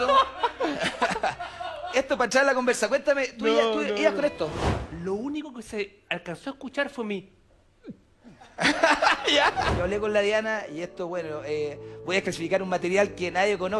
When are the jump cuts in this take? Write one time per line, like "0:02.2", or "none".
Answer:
0:04.7
0:09.7